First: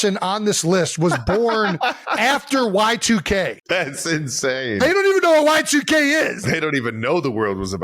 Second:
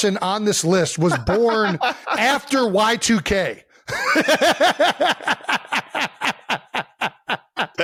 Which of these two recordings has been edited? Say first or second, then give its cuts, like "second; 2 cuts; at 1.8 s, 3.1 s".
first; 2 cuts; at 3.6 s, 6.4 s